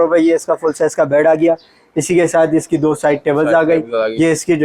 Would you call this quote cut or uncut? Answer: uncut